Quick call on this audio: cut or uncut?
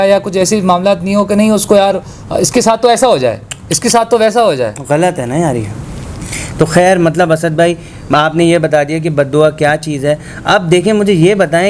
uncut